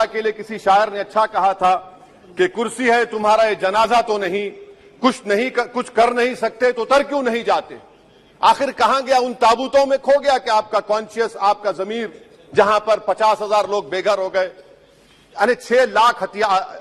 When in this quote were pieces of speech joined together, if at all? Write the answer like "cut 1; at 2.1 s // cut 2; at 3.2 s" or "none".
none